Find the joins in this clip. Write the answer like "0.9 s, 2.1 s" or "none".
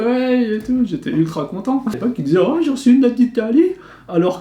2.0 s